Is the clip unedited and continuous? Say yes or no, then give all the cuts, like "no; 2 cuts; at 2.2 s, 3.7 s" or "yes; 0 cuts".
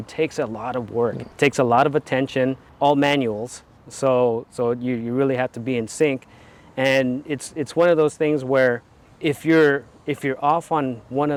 yes; 0 cuts